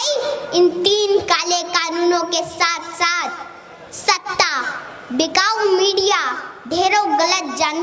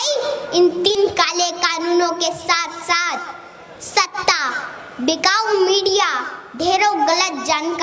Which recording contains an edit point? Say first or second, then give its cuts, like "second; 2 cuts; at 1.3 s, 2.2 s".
second; 1 cut; at 0.9 s